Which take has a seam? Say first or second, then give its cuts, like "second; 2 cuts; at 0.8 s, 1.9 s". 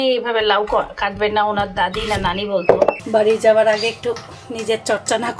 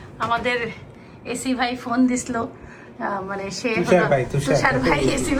first; 1 cut; at 3.0 s